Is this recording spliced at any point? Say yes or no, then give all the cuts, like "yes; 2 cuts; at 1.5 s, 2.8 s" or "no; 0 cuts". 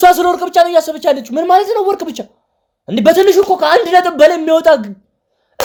no; 0 cuts